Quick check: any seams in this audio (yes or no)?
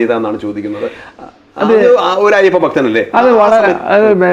no